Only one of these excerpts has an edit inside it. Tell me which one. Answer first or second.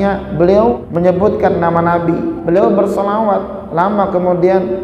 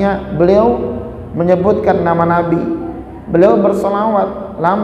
first